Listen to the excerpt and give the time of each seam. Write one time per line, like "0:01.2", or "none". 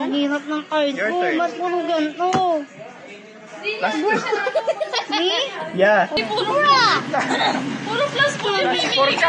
0:06.1